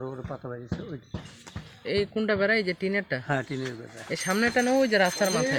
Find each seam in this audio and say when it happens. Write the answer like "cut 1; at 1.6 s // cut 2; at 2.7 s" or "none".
none